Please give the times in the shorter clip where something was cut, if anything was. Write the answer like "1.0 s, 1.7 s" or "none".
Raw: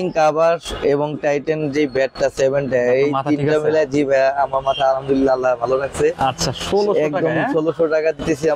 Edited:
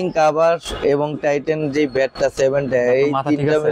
none